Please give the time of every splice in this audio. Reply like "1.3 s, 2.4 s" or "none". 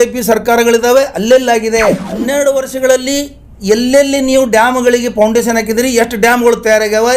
2.3 s